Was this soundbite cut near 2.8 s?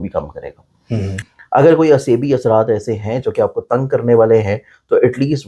no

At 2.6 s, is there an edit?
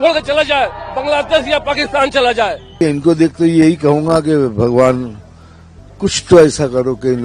yes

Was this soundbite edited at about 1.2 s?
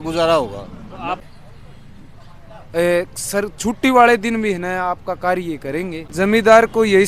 yes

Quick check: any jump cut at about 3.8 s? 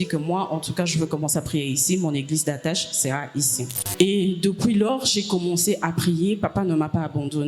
yes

